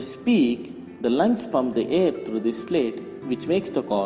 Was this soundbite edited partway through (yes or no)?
yes